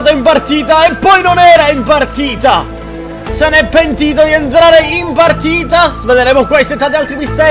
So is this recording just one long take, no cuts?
yes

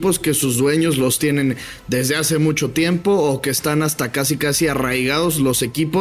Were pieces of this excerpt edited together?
no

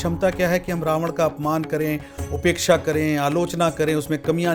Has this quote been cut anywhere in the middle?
no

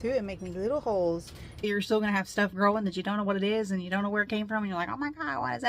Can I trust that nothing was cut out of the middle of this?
no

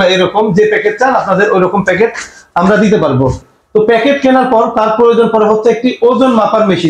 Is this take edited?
no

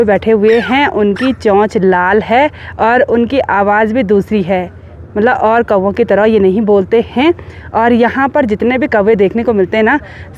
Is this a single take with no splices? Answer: yes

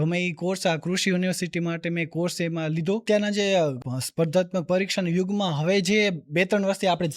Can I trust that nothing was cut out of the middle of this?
no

